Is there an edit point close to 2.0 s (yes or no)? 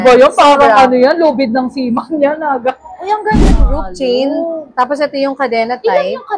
no